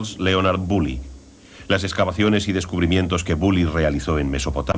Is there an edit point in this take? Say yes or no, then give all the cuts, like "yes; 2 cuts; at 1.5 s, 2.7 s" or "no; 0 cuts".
yes; 1 cut; at 1.9 s